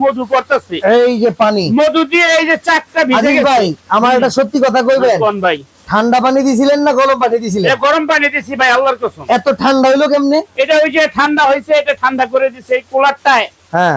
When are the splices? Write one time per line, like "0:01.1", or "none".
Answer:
none